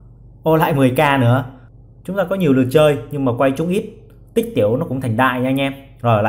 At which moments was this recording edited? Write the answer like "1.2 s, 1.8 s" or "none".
1.6 s